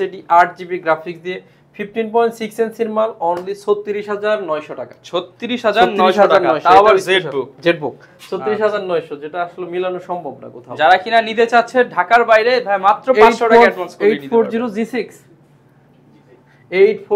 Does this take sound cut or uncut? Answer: uncut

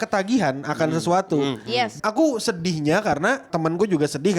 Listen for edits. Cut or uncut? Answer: cut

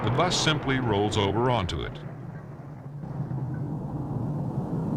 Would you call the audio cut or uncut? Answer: uncut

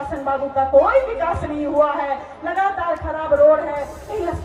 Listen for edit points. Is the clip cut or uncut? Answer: uncut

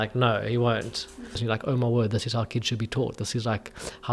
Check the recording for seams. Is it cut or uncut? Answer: cut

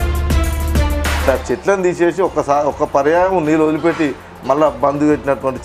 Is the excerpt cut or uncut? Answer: cut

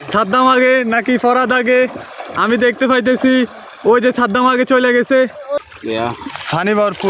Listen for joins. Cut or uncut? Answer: cut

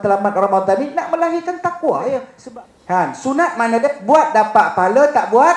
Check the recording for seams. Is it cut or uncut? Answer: cut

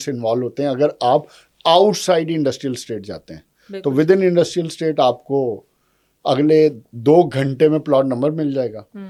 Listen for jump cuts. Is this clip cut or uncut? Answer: uncut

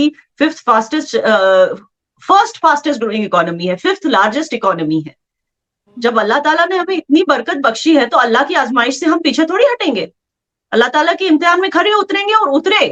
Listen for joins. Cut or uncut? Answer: uncut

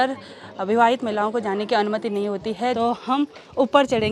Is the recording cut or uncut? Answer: cut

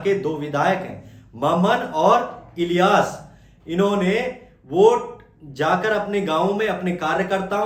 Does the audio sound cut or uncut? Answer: uncut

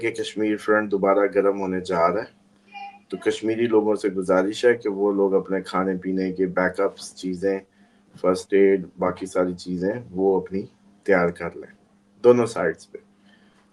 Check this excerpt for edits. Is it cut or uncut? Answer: uncut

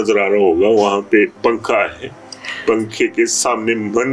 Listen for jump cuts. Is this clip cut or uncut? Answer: uncut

